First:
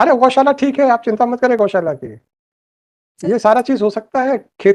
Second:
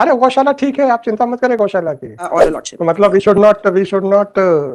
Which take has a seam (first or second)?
second